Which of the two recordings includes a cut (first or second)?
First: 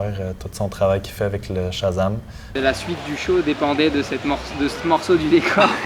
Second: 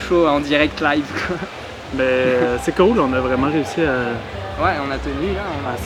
first